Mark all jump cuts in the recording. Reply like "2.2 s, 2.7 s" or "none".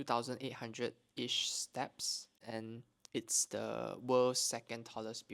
2.4 s